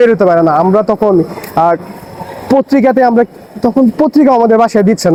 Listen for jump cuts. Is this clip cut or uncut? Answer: uncut